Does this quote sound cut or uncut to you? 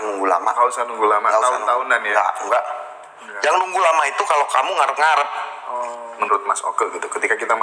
cut